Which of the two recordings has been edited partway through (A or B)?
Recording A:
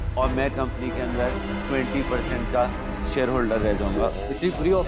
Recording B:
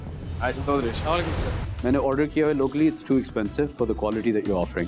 B